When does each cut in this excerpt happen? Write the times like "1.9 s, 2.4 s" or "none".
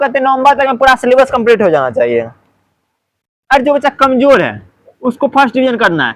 none